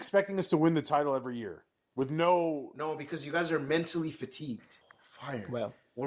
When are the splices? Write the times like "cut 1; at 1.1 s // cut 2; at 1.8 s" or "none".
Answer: cut 1; at 4.8 s